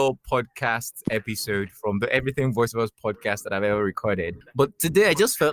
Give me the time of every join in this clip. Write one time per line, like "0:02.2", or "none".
0:04.4